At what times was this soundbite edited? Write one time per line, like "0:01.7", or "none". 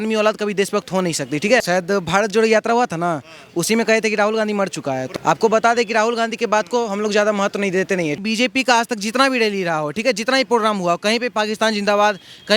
0:01.7
0:05.0
0:08.2